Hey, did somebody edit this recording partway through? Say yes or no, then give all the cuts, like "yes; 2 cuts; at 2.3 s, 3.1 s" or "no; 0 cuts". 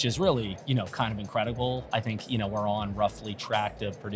no; 0 cuts